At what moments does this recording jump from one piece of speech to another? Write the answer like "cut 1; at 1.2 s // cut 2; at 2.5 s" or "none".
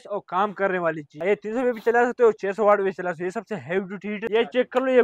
cut 1; at 1.1 s // cut 2; at 4.2 s